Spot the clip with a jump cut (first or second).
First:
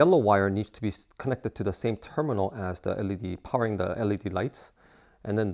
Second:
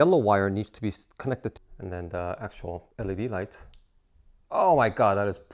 second